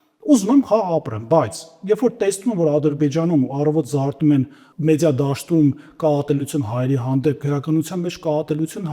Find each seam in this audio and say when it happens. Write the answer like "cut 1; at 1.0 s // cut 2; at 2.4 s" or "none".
cut 1; at 4.6 s